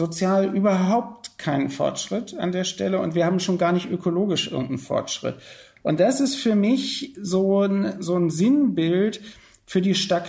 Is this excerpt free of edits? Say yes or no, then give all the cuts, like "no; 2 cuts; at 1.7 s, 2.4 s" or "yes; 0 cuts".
yes; 0 cuts